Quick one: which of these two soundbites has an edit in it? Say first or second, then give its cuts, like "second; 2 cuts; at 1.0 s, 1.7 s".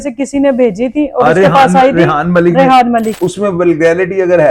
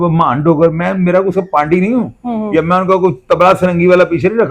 first; 1 cut; at 3.1 s